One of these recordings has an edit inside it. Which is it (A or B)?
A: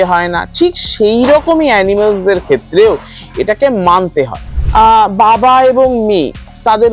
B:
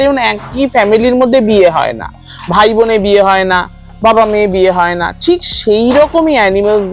A